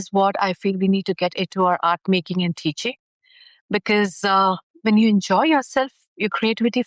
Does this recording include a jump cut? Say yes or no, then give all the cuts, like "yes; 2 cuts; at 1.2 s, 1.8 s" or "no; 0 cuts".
no; 0 cuts